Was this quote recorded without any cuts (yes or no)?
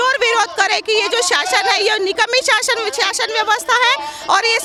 yes